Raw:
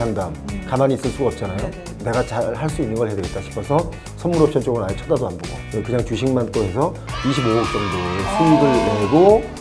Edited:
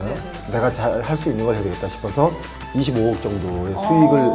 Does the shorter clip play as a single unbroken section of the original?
no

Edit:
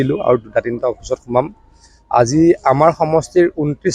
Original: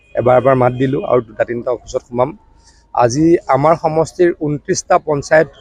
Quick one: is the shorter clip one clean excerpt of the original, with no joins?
yes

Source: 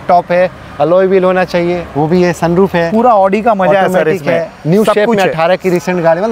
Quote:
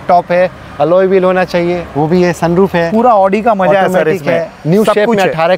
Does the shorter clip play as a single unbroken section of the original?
yes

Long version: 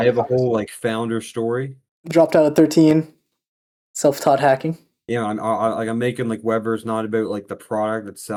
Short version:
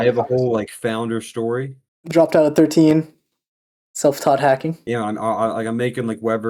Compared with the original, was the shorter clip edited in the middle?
yes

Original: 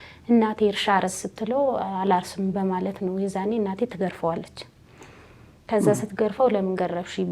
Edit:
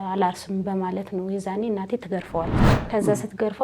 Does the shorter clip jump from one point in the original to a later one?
yes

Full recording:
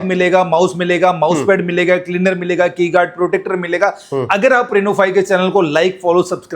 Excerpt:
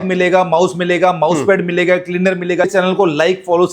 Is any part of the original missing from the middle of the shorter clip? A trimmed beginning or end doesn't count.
yes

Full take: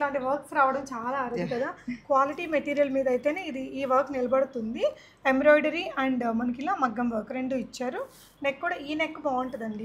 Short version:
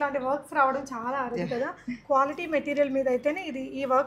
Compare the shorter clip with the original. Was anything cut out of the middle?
no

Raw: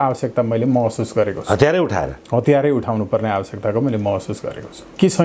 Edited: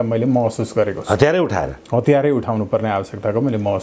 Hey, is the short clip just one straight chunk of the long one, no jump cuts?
yes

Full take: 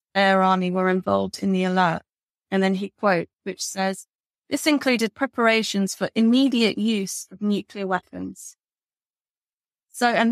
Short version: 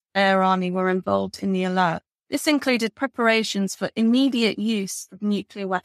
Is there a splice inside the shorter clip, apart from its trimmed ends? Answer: yes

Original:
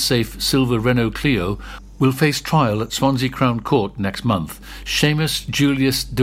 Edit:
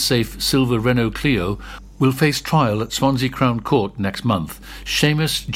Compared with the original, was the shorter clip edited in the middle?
no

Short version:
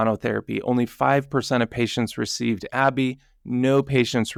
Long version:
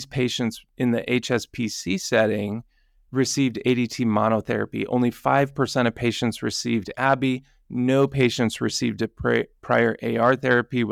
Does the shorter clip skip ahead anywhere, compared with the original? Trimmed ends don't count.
no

